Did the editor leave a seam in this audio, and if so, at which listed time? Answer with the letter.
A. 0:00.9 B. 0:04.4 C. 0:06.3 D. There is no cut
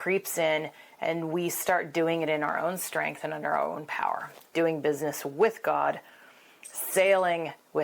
B